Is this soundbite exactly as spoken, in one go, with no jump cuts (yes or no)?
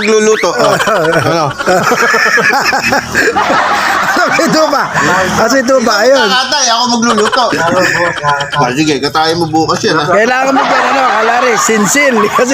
no